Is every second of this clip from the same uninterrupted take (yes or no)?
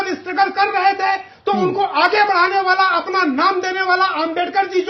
yes